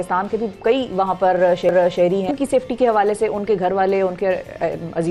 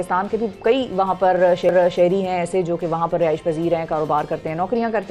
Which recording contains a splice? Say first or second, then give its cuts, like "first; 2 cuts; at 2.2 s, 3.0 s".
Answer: first; 1 cut; at 2.3 s